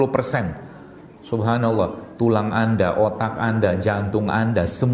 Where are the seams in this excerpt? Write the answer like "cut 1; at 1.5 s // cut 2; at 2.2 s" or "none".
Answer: none